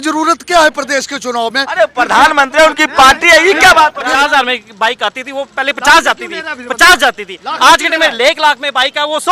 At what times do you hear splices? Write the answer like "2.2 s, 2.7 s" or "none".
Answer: 4.1 s